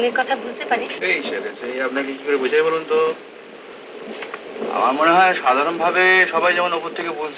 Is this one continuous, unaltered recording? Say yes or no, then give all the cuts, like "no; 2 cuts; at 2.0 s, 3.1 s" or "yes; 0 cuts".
yes; 0 cuts